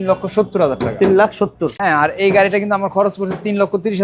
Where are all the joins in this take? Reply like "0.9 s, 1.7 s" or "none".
1.8 s